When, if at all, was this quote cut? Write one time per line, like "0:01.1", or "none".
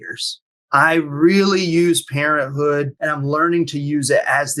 0:03.0